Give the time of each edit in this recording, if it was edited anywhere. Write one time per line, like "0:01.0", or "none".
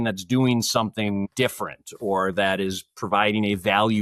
0:01.3